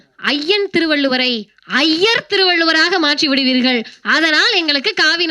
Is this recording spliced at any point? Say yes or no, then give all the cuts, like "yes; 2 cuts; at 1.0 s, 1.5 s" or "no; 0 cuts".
no; 0 cuts